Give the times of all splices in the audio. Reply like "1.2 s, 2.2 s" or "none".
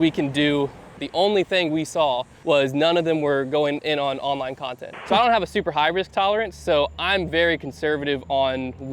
1.0 s, 2.3 s, 5.0 s